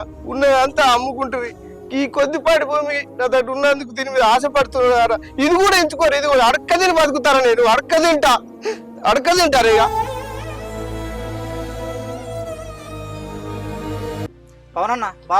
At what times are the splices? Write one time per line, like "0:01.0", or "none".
0:14.2